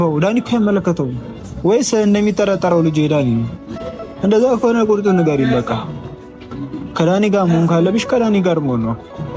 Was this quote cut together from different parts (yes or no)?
no